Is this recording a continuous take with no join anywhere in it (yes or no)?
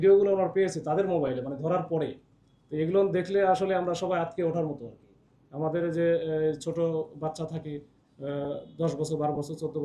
yes